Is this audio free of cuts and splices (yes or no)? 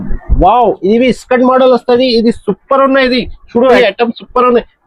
no